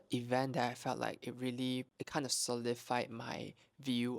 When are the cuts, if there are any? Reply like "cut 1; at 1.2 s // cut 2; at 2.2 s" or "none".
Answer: cut 1; at 2.0 s